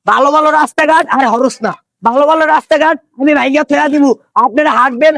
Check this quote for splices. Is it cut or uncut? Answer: uncut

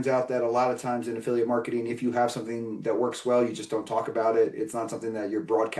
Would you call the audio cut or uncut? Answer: uncut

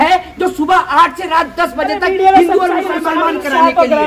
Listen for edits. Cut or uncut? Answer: cut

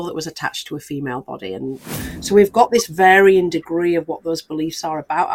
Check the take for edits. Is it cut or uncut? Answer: cut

